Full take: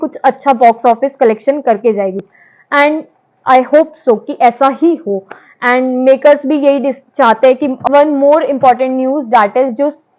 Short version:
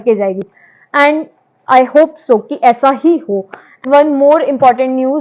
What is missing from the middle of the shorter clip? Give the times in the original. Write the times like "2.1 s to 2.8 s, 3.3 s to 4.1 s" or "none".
5.6 s to 7.8 s